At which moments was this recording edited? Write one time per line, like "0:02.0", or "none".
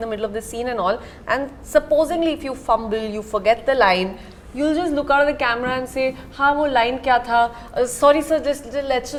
none